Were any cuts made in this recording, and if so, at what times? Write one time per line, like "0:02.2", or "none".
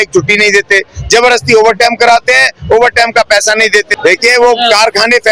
0:03.9